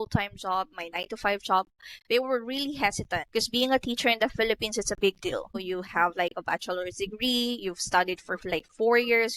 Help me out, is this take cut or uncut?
cut